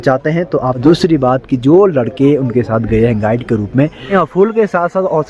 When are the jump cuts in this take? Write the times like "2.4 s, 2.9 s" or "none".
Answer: 0.8 s, 4.1 s